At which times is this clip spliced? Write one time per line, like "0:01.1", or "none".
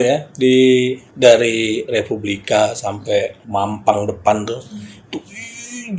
0:01.0
0:03.4